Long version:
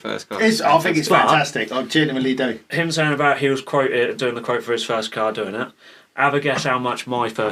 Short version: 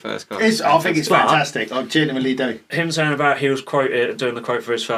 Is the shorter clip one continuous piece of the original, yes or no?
yes